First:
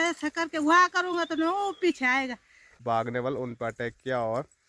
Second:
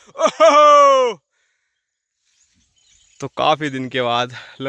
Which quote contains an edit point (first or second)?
first